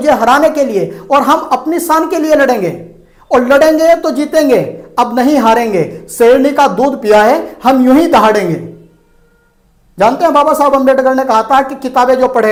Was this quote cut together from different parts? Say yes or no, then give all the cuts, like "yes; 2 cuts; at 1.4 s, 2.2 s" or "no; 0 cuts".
no; 0 cuts